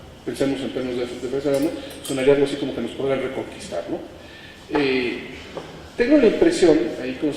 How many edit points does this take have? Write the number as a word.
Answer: one